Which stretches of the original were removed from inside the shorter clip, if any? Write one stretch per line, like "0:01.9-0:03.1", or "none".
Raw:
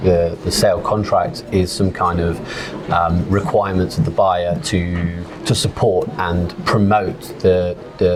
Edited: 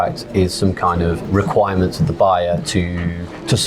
0:02.4-0:03.2